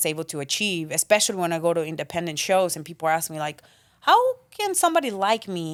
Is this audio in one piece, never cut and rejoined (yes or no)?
yes